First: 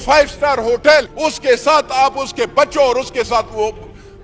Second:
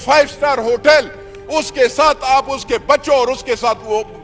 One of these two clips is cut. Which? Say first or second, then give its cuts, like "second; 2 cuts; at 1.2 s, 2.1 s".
first; 1 cut; at 1.1 s